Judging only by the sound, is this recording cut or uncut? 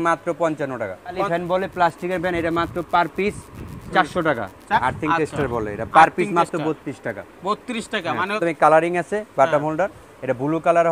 cut